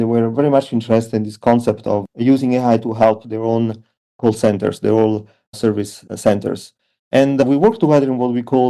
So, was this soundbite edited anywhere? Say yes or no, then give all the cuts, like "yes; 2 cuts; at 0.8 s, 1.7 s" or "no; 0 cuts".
yes; 1 cut; at 2.1 s